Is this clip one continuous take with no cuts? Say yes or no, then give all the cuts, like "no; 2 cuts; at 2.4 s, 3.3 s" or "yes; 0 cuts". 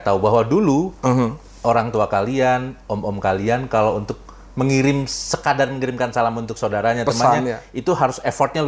yes; 0 cuts